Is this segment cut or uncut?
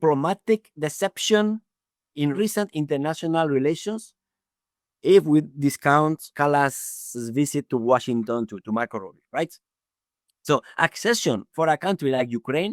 cut